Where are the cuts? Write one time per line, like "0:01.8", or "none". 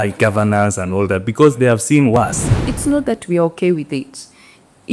0:02.7